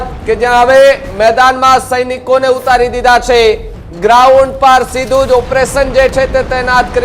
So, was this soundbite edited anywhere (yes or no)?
no